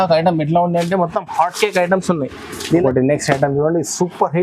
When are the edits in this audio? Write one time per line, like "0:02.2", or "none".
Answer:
0:02.6